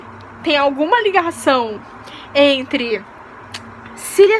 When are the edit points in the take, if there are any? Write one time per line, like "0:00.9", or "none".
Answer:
none